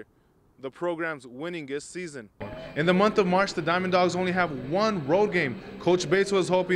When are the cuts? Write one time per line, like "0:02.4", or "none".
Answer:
0:02.3